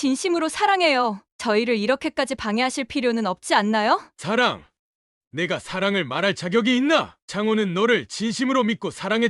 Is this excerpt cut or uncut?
cut